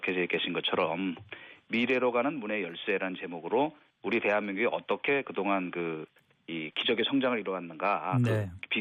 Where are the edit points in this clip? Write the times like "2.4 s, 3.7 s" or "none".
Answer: none